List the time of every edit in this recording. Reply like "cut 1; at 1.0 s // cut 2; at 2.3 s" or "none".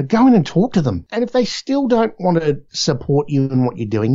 cut 1; at 1.0 s // cut 2; at 2.7 s